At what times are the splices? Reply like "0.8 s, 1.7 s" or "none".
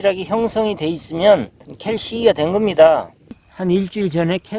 3.4 s